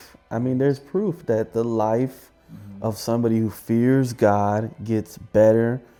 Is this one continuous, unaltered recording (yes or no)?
yes